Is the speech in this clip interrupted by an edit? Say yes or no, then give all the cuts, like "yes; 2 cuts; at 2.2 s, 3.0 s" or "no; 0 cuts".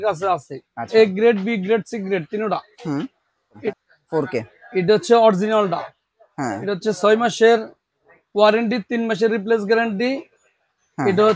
yes; 1 cut; at 3.6 s